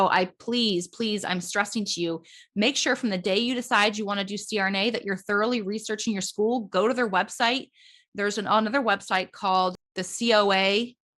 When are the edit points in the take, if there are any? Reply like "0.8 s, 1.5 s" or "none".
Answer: 9.8 s